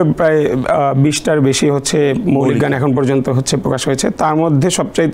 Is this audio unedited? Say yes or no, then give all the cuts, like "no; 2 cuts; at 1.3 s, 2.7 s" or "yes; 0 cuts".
yes; 0 cuts